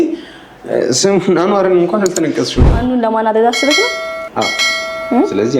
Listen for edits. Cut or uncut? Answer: cut